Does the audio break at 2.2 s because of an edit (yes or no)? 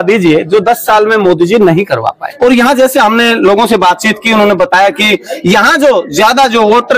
yes